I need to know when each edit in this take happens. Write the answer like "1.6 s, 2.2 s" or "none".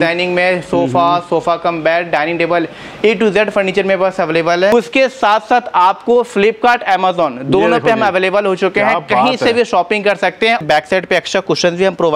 4.7 s, 10.6 s